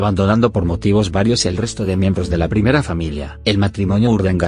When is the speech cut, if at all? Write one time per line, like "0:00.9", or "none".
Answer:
0:02.4